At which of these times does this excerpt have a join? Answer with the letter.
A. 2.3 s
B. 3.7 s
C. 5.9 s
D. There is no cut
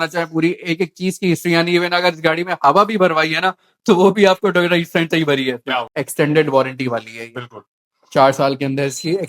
C